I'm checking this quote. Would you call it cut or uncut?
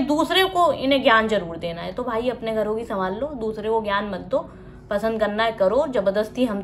uncut